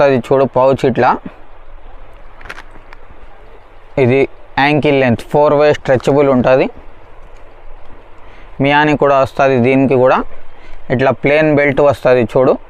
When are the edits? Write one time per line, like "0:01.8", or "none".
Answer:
none